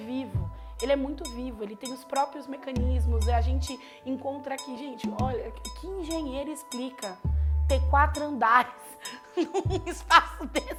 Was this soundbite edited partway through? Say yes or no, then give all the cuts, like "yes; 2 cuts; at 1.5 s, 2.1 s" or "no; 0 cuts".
no; 0 cuts